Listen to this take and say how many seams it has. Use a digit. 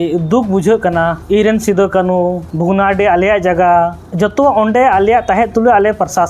3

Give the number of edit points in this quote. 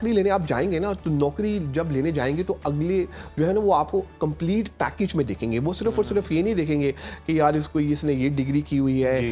0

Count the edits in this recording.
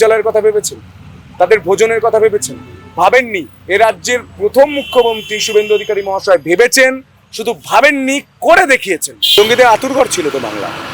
1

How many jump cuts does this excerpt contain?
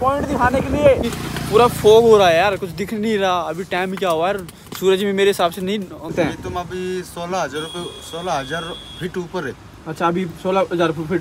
2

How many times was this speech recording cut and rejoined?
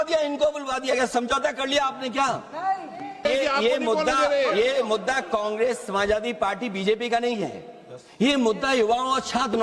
1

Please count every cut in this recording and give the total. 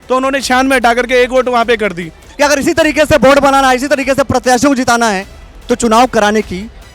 1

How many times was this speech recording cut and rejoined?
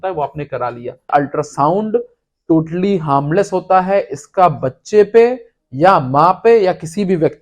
1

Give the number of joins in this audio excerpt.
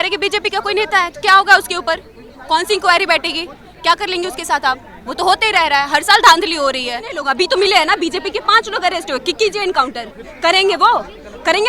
1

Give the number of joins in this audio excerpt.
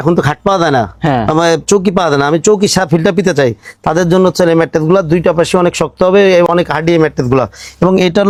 0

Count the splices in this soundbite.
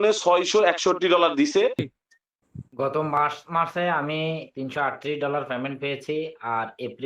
1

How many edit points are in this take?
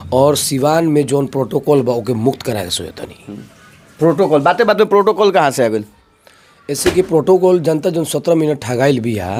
0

